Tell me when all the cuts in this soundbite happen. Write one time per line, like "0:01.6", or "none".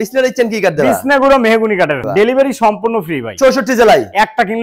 0:02.0